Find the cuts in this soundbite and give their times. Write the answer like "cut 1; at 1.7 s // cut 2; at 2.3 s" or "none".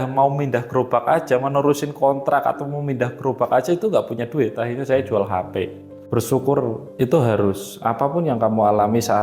cut 1; at 6.0 s